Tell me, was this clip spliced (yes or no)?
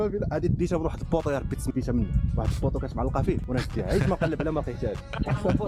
no